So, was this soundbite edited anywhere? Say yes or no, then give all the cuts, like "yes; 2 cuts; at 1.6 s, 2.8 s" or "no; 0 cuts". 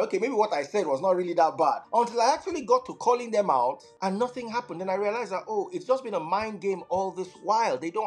yes; 2 cuts; at 1.8 s, 3.9 s